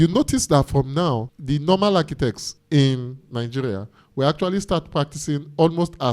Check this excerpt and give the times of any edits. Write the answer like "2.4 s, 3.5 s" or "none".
1.3 s, 2.5 s